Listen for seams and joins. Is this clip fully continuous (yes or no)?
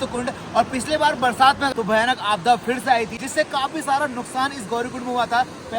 no